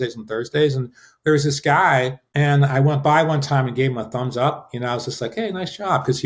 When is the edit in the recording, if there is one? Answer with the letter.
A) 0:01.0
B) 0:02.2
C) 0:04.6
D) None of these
B